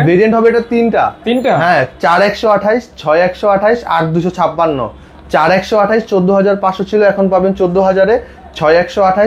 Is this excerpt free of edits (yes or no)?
yes